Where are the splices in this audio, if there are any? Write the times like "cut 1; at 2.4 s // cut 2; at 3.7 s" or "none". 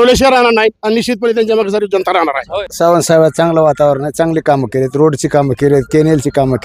cut 1; at 2.6 s